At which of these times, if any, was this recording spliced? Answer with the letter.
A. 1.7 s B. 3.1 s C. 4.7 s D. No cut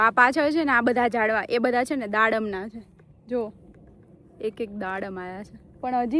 D